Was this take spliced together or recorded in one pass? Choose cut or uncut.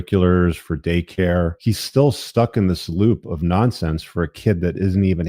cut